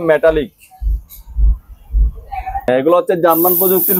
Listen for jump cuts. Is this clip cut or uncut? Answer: cut